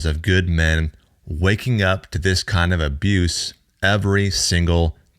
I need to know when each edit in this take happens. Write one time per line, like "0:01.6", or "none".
none